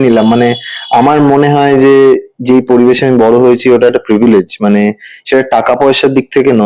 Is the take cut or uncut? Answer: uncut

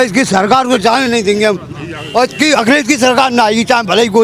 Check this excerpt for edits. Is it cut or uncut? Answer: uncut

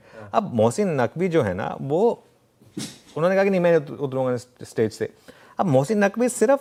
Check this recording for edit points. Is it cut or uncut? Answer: uncut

